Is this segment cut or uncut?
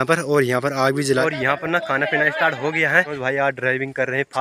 cut